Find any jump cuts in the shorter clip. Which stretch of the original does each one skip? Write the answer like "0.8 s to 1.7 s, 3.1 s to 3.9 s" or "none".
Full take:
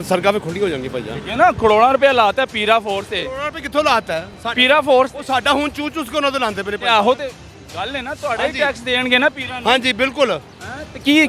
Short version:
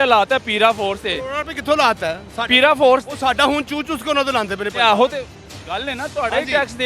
none